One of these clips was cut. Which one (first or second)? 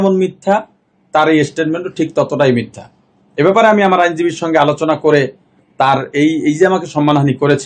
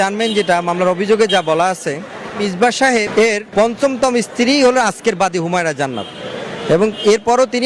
second